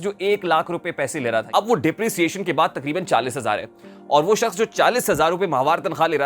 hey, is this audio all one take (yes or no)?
no